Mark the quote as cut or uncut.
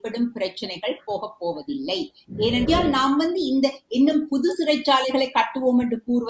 cut